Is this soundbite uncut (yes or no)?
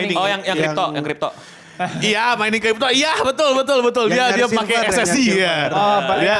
yes